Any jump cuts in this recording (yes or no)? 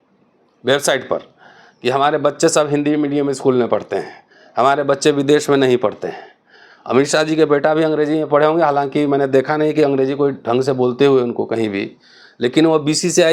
no